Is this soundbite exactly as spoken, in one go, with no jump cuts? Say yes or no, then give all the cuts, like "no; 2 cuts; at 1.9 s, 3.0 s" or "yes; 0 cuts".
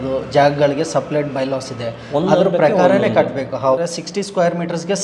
no; 1 cut; at 3.9 s